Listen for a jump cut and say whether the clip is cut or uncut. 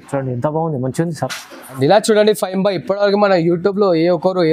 cut